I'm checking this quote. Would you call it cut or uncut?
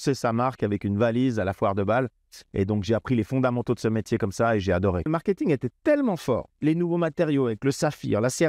cut